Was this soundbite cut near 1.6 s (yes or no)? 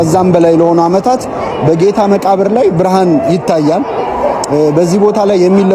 no